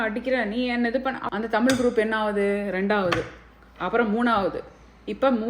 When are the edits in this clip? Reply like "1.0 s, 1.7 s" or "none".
1.2 s